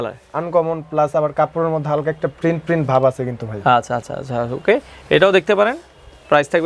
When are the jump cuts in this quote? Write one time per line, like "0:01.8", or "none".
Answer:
none